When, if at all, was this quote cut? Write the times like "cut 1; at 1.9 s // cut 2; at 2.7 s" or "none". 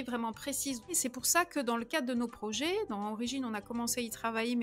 cut 1; at 0.9 s